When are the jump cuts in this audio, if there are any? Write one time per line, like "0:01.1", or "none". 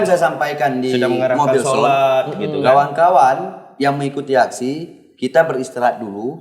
none